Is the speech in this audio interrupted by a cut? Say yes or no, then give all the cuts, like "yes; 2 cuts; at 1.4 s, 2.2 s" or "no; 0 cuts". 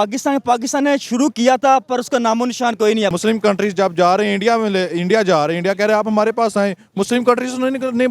yes; 1 cut; at 3.1 s